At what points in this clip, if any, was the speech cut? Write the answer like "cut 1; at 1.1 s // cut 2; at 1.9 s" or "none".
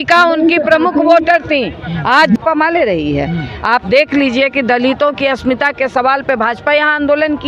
cut 1; at 2.4 s